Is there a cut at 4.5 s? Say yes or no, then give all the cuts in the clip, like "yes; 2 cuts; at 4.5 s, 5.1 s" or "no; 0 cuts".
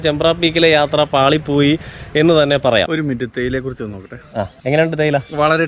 yes; 2 cuts; at 2.8 s, 4.5 s